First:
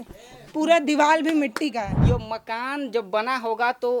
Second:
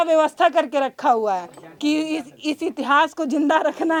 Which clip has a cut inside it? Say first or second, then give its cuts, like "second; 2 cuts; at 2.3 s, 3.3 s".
first; 1 cut; at 2.0 s